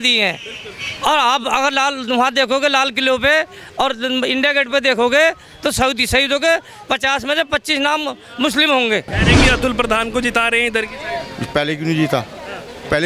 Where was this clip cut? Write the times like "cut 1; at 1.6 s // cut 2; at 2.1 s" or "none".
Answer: cut 1; at 9.2 s